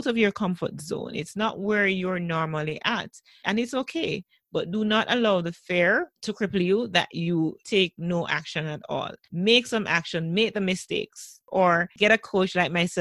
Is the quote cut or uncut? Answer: cut